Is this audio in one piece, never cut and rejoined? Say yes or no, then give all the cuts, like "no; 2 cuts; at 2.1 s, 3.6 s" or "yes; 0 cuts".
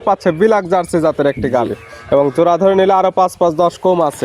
yes; 0 cuts